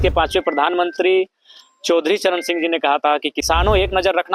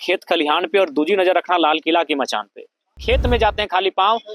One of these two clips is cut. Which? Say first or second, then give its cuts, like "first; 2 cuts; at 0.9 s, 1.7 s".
second; 1 cut; at 3.0 s